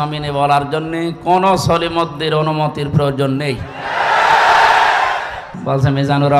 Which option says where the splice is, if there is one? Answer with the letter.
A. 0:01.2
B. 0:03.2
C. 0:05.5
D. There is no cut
C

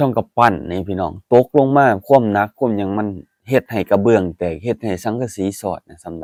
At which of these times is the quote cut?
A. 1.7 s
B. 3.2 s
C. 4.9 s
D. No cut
D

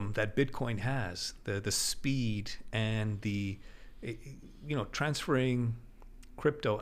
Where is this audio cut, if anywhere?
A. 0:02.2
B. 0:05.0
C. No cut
C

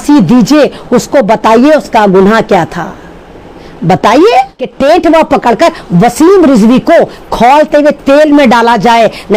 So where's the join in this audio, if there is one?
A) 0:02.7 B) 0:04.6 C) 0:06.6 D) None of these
B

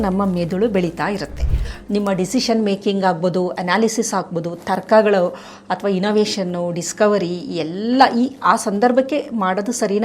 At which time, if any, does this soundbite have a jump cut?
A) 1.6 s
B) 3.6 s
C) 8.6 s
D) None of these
A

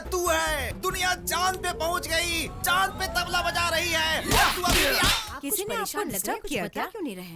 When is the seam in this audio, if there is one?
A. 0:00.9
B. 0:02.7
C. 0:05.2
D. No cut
C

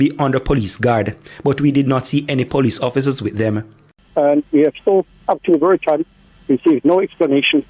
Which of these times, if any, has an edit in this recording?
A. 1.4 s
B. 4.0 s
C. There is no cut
B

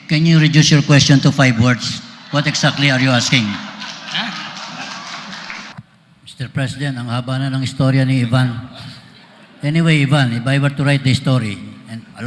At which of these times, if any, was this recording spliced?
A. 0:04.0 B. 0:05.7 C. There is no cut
B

